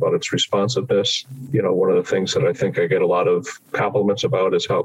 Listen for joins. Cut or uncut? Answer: cut